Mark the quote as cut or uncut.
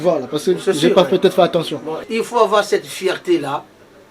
cut